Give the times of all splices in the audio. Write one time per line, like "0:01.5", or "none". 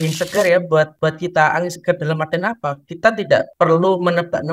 0:00.9
0:03.5